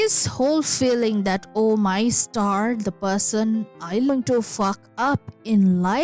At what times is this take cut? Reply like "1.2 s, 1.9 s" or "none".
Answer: 4.1 s